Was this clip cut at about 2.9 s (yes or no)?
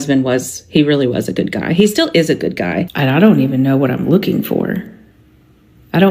yes